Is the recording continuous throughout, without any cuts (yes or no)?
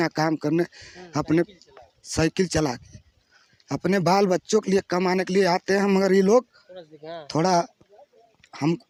yes